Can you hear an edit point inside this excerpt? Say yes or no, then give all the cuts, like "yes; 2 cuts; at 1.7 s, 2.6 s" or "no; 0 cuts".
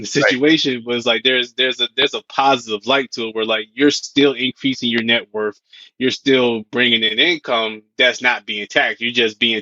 no; 0 cuts